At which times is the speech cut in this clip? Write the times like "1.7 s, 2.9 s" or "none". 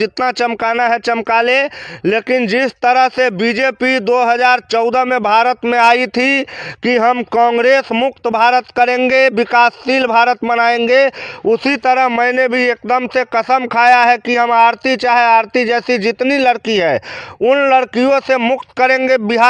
none